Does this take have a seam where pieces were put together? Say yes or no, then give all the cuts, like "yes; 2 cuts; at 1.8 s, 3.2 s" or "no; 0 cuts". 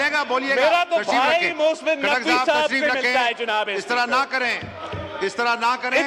no; 0 cuts